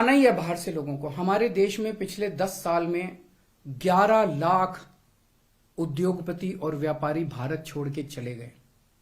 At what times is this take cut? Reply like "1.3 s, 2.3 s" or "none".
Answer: none